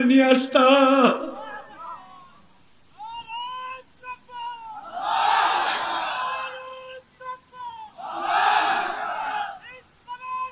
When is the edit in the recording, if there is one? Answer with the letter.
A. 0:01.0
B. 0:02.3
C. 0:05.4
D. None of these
D